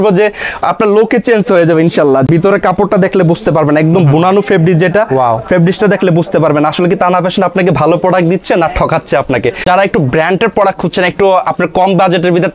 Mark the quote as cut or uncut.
cut